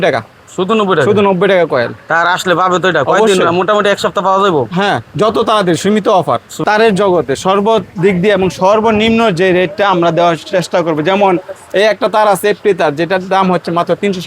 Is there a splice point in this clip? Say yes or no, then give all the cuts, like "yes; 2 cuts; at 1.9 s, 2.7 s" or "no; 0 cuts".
yes; 1 cut; at 6.5 s